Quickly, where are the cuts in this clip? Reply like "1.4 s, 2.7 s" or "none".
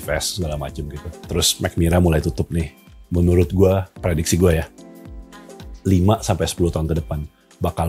none

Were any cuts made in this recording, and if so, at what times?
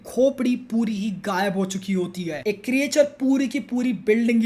2.4 s

